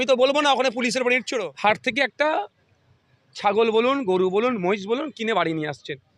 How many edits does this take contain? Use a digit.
1